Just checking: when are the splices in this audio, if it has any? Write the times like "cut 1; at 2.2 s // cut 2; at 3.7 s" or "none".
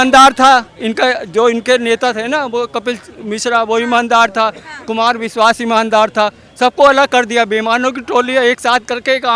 none